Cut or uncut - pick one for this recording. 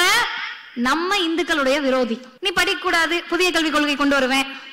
cut